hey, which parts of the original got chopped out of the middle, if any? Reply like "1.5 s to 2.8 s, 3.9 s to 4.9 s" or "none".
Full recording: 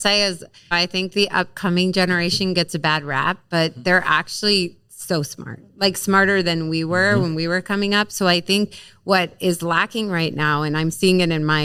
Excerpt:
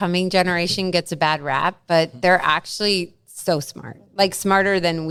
none